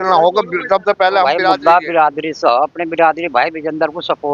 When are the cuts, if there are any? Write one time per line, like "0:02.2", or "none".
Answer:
0:01.4

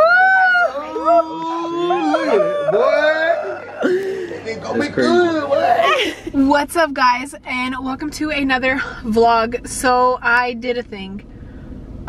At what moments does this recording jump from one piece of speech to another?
none

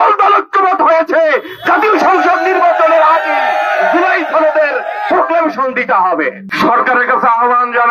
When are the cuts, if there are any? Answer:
0:06.4

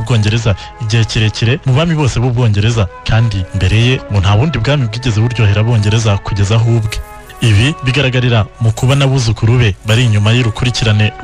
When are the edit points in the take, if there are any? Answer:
0:04.3

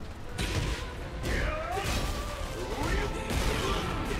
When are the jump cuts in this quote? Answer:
none

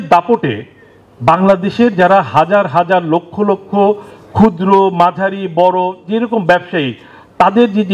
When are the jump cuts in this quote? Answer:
none

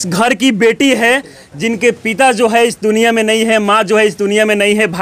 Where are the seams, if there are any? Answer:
none

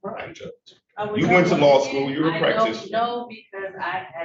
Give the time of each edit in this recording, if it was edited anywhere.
none

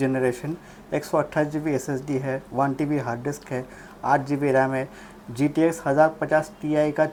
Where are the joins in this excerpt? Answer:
none

